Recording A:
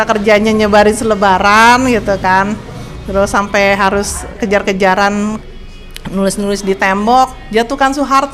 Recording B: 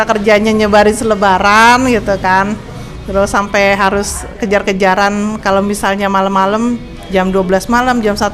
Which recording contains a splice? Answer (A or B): A